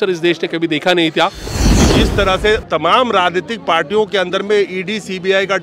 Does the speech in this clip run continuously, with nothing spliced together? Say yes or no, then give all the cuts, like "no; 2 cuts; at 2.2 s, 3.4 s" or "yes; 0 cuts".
no; 1 cut; at 1.9 s